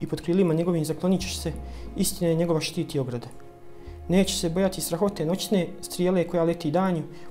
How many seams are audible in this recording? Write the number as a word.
one